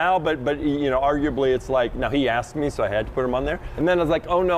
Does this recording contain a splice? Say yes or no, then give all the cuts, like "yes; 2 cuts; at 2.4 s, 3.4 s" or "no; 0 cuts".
yes; 1 cut; at 3.6 s